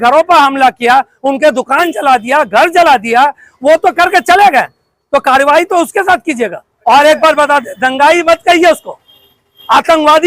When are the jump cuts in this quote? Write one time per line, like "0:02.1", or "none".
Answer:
0:06.7

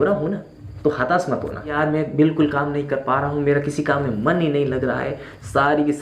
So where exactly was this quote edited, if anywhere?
0:01.8

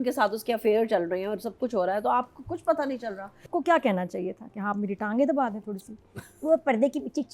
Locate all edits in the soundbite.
0:03.5

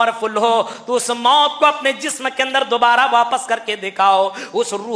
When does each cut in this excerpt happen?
none

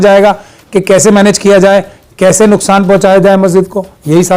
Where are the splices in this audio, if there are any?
none

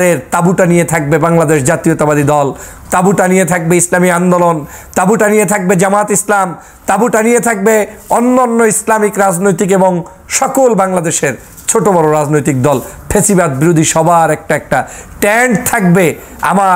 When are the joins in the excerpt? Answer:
none

